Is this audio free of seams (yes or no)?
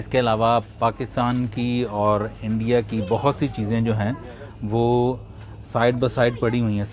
yes